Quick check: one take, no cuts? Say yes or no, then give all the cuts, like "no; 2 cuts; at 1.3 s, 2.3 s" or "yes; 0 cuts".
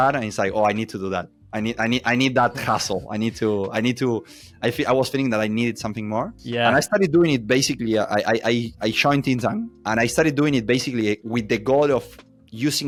yes; 0 cuts